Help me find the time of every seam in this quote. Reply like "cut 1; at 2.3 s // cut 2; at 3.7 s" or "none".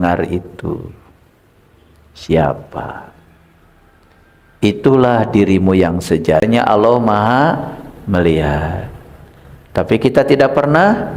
cut 1; at 6.4 s